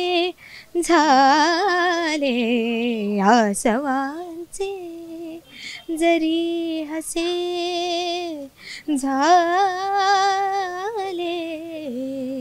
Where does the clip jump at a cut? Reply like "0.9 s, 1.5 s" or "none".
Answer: none